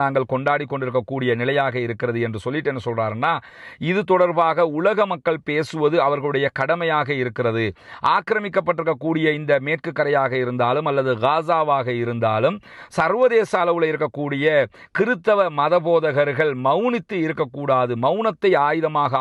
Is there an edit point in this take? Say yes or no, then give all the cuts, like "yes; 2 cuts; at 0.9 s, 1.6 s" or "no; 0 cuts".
no; 0 cuts